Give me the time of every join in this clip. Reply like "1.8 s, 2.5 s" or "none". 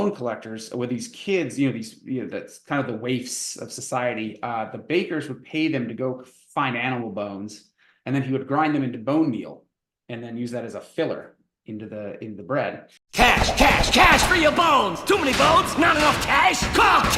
none